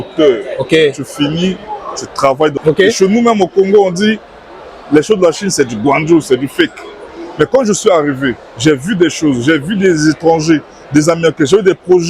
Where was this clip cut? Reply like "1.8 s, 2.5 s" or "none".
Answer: 2.6 s